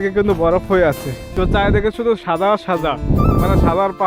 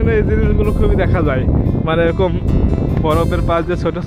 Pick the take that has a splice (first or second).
first